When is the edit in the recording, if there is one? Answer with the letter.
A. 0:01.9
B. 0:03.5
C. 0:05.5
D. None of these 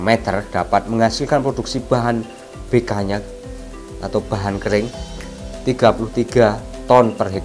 C